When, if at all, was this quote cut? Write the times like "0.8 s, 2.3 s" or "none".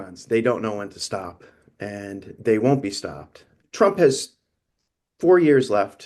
3.6 s